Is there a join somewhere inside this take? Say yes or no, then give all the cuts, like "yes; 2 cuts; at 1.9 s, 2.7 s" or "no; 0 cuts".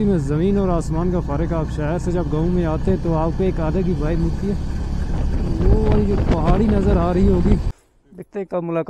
yes; 1 cut; at 7.7 s